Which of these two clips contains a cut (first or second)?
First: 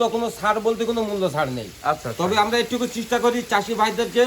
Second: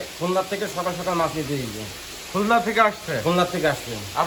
first